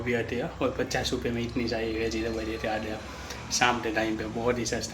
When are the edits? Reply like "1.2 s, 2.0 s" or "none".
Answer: none